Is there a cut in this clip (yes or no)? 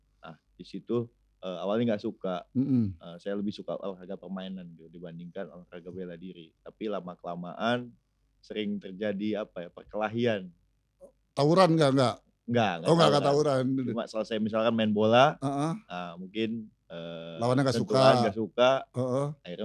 no